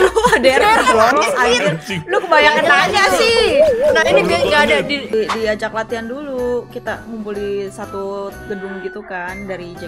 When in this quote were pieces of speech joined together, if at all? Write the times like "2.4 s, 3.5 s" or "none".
5.1 s